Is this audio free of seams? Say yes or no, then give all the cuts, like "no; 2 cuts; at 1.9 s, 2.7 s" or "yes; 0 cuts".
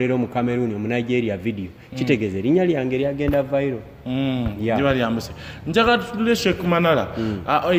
yes; 0 cuts